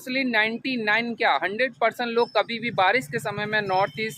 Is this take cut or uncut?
uncut